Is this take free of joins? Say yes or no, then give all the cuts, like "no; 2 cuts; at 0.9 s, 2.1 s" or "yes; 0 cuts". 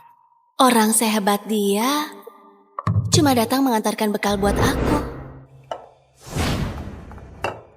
yes; 0 cuts